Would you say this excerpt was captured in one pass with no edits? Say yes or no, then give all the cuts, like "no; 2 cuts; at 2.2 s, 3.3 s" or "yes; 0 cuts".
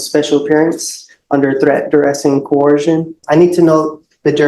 no; 1 cut; at 3.2 s